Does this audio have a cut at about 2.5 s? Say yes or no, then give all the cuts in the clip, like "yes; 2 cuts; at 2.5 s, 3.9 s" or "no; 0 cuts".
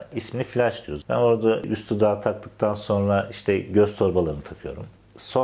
no; 1 cut; at 1.0 s